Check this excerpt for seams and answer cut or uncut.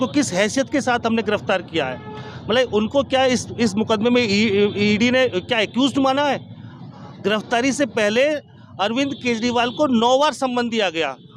uncut